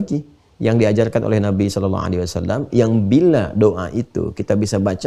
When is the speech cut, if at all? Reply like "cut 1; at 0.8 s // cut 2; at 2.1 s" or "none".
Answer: none

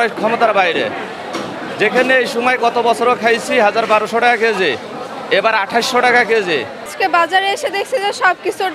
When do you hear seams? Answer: cut 1; at 6.9 s

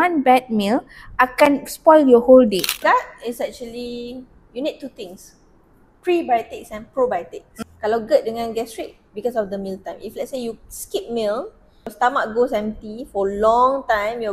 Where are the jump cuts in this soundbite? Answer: cut 1; at 2.7 s // cut 2; at 7.5 s // cut 3; at 11.9 s

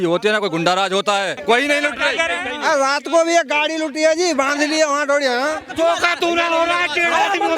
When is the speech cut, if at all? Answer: cut 1; at 1.4 s // cut 2; at 5.6 s

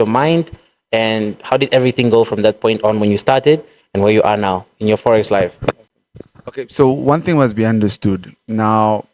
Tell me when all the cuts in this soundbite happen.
none

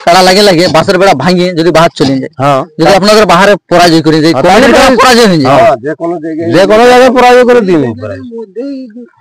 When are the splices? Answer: none

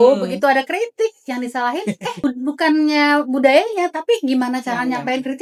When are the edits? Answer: none

